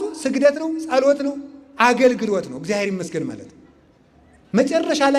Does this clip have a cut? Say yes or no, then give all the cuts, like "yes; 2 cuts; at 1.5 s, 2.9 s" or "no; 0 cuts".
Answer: no; 0 cuts